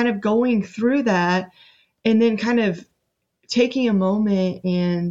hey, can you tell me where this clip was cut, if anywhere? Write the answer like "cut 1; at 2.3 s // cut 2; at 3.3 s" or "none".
none